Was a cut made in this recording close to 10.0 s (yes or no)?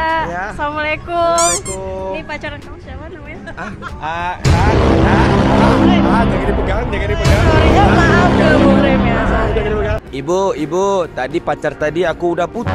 yes